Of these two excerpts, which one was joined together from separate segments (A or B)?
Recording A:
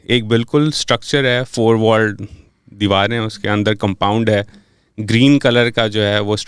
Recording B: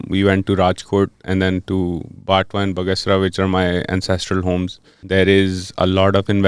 B